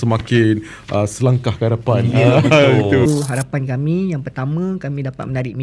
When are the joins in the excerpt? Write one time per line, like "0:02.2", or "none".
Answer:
0:03.1